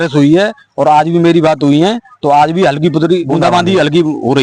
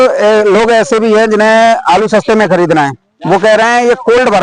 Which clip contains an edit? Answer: first; 1 cut; at 3.2 s

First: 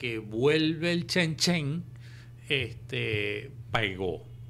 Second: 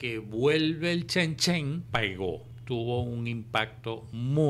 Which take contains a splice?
second; 1 cut; at 2.4 s

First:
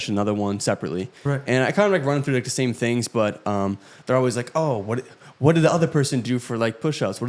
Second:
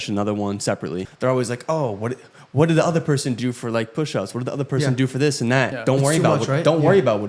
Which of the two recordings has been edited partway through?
second; 2 cuts; at 1.1 s, 5.8 s

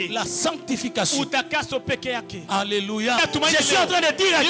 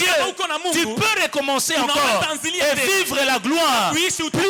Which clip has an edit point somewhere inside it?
first; 1 cut; at 3.2 s

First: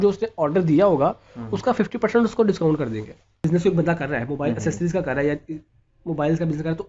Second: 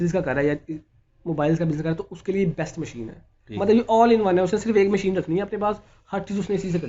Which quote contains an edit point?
first; 1 cut; at 3.4 s

